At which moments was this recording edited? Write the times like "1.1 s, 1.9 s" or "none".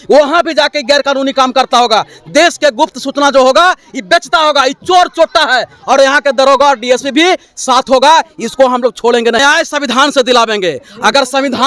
9.4 s